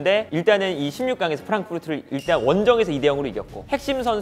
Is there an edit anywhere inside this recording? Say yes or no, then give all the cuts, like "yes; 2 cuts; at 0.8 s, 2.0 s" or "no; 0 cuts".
no; 0 cuts